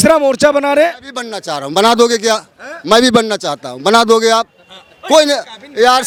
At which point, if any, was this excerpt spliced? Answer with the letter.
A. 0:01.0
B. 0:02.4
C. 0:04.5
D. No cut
D